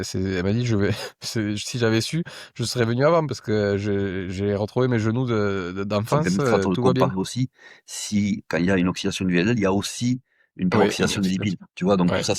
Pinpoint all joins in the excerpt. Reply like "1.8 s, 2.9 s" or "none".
7.0 s